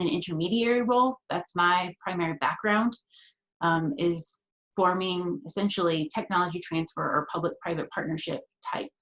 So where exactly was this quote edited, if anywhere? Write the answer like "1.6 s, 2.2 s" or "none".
none